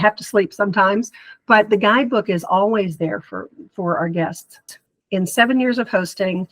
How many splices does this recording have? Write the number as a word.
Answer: one